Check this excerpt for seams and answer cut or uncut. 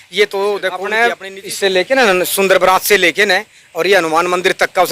cut